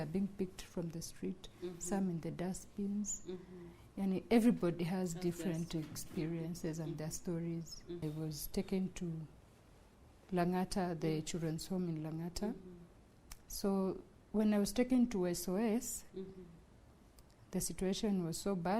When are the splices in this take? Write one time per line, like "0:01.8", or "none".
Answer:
0:08.1